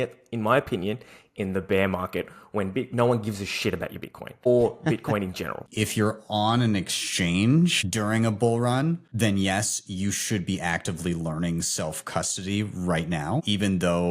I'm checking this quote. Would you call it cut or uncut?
cut